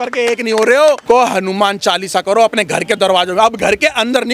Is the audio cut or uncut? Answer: cut